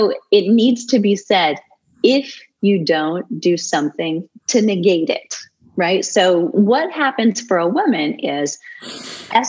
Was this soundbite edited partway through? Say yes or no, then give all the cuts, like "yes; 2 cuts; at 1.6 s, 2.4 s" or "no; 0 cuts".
no; 0 cuts